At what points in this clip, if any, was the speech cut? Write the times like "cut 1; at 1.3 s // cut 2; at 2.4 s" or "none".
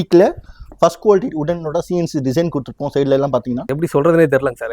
cut 1; at 3.7 s